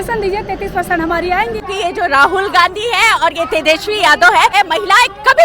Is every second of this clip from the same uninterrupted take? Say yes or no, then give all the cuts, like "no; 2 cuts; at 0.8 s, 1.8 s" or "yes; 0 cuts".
no; 2 cuts; at 1.7 s, 4.5 s